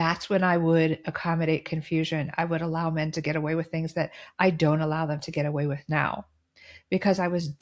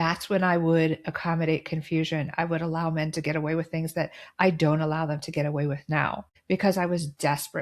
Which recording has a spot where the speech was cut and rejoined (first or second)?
second